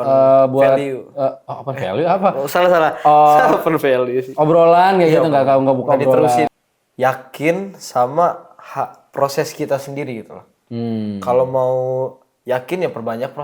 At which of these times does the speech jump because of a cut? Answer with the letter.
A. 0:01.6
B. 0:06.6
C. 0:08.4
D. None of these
B